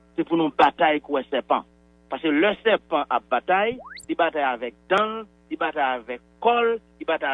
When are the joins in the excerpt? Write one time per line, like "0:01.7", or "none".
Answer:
none